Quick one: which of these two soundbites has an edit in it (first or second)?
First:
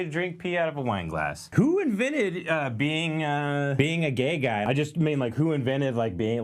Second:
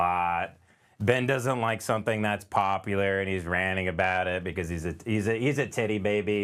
first